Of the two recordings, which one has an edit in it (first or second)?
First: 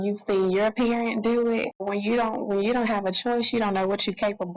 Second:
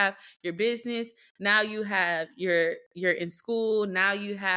first